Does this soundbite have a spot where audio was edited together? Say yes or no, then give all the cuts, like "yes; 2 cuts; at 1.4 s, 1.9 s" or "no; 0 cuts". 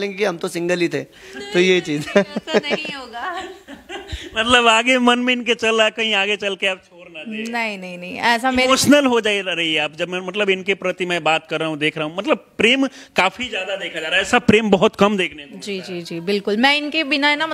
no; 0 cuts